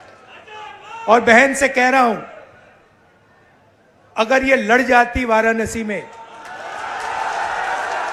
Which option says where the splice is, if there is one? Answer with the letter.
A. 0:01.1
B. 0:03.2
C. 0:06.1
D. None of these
D